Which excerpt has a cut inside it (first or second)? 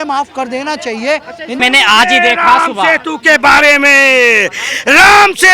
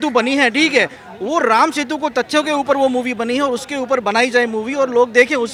first